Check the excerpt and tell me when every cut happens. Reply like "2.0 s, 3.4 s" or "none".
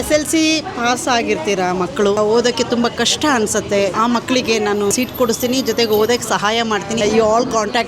2.2 s, 3.9 s, 4.9 s, 7.0 s